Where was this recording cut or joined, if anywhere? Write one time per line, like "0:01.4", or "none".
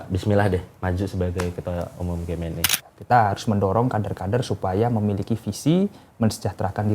0:02.7